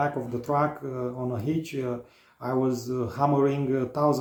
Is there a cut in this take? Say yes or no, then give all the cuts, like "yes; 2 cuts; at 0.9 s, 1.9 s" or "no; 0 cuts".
no; 0 cuts